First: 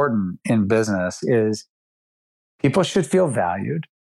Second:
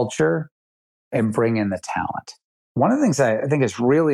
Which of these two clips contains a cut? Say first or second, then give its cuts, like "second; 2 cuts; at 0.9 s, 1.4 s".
second; 2 cuts; at 1.1 s, 2.6 s